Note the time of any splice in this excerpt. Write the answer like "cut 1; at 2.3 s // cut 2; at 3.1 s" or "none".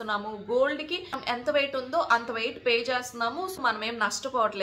cut 1; at 1.2 s // cut 2; at 3.6 s